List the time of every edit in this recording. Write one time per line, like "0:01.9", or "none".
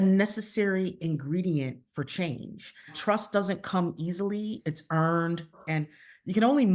0:03.0
0:04.6
0:05.6